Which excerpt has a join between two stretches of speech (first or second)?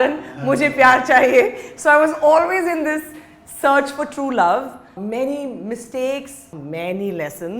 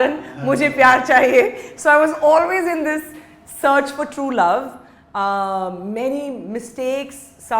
first